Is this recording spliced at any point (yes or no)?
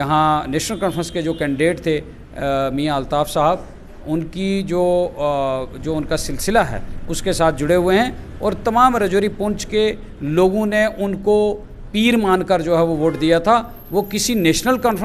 no